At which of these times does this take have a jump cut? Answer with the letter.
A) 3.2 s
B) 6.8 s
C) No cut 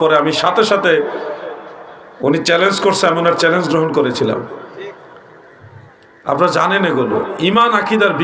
C